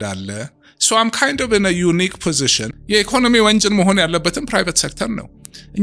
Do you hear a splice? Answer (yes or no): yes